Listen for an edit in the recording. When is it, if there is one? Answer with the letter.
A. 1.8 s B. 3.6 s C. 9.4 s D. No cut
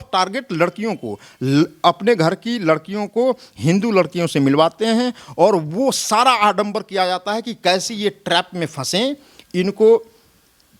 D